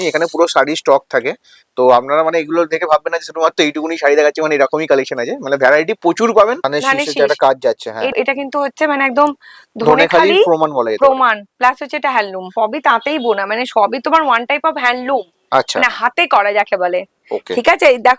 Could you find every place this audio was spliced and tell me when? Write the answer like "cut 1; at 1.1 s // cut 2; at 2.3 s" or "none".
cut 1; at 6.7 s // cut 2; at 8.1 s // cut 3; at 12.5 s